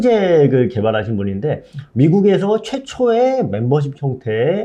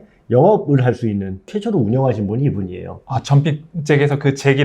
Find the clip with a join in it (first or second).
second